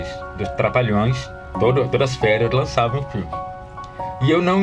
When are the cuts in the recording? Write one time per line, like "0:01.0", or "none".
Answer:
0:01.5